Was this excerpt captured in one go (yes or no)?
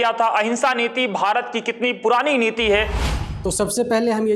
no